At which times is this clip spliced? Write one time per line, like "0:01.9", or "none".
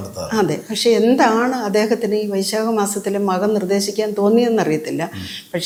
none